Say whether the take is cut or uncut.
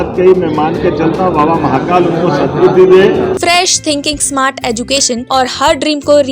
cut